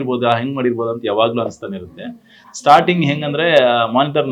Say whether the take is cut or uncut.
uncut